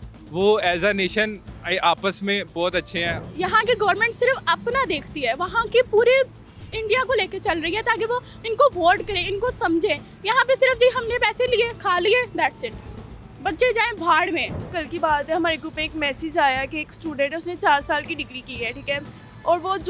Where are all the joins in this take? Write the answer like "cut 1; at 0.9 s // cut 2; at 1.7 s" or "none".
cut 1; at 3.2 s // cut 2; at 14.7 s